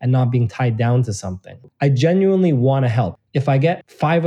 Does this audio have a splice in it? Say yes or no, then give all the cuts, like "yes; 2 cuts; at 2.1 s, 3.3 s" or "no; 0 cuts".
yes; 2 cuts; at 1.6 s, 3.2 s